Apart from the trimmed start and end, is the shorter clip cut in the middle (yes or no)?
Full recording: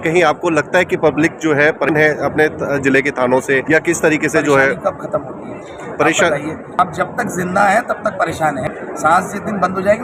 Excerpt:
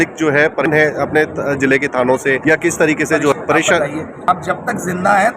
yes